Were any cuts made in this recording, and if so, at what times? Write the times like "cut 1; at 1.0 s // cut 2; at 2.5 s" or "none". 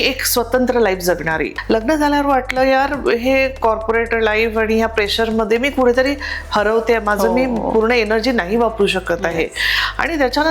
cut 1; at 1.5 s